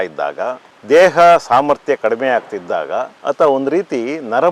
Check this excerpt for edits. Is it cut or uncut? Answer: cut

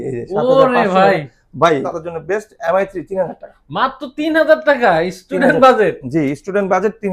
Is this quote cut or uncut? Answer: cut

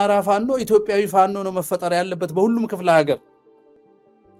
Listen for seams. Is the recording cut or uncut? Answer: uncut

